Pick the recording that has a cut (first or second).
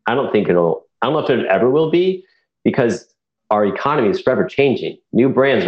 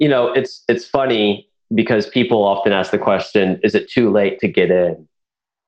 first